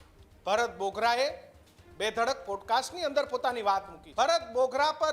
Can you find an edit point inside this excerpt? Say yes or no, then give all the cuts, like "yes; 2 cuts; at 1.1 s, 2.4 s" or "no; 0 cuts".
yes; 1 cut; at 4.0 s